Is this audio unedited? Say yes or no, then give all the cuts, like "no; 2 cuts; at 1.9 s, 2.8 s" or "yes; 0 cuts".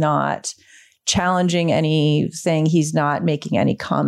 yes; 0 cuts